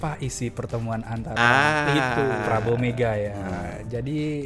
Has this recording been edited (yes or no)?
no